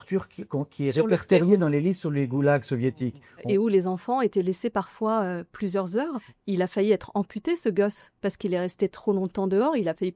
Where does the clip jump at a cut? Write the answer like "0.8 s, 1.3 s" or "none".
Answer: 3.4 s, 6.2 s